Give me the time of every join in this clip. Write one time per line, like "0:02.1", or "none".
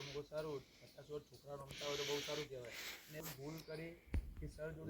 0:03.2